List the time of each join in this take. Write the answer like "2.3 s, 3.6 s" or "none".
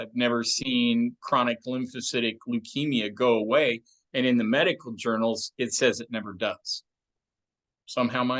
none